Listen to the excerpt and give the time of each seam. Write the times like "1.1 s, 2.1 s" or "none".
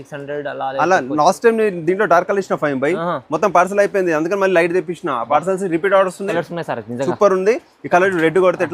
6.3 s